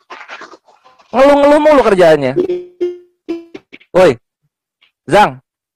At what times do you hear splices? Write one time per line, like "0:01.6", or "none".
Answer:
none

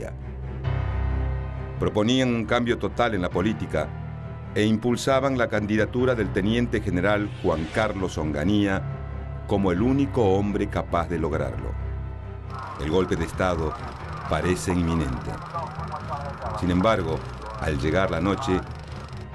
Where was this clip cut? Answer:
none

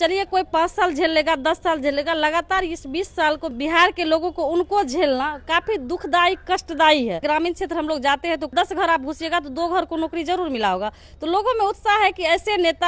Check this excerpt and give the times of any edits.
0:03.5
0:07.2
0:08.5

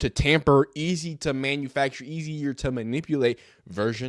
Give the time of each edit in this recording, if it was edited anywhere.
none

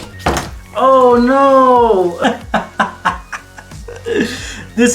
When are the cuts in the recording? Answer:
0:02.2

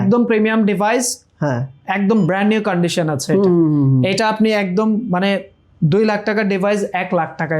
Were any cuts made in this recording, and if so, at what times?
none

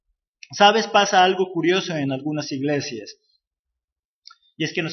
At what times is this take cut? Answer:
0:01.6

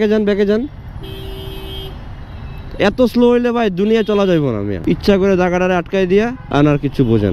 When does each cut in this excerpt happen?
0:04.7
0:06.4

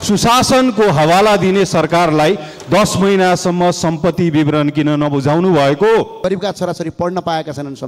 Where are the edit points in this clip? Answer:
0:06.2

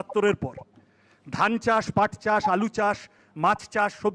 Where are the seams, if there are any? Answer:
none

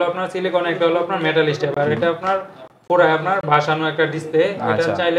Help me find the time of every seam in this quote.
none

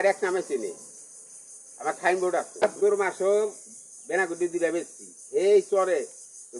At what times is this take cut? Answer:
0:02.6

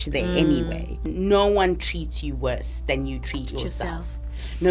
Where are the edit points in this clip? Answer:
0:01.1

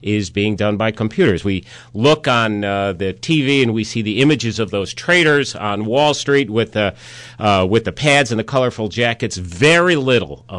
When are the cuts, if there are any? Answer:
none

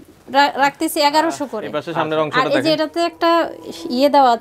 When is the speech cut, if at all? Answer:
0:01.8

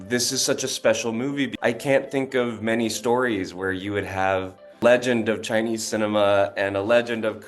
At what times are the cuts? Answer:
0:01.5

